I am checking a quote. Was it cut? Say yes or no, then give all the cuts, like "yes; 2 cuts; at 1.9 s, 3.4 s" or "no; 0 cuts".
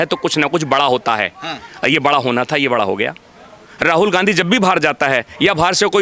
no; 0 cuts